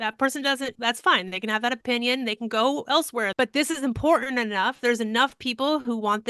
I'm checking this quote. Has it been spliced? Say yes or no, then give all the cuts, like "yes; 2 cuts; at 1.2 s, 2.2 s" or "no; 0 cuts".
yes; 1 cut; at 3.3 s